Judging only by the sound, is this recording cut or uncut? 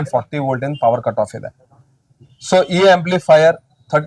uncut